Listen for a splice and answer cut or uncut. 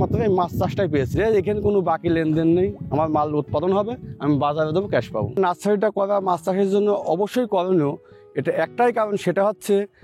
cut